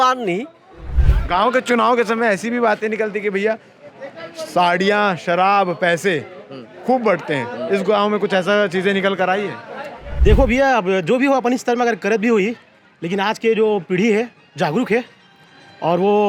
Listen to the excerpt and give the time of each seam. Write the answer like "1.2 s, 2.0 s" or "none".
0.9 s, 10.0 s